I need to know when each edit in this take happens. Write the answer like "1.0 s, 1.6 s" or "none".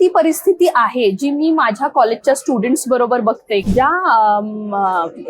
3.6 s